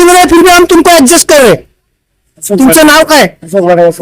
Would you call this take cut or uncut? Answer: cut